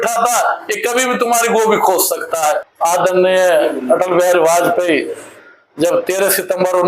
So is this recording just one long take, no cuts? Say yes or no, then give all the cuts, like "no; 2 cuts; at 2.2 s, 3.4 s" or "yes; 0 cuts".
no; 1 cut; at 2.7 s